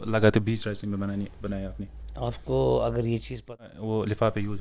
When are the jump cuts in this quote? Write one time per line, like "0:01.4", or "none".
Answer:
0:03.5